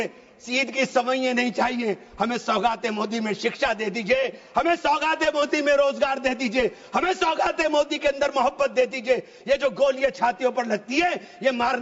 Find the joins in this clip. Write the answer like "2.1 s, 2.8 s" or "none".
none